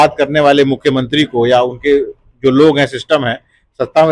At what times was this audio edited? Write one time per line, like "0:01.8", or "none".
none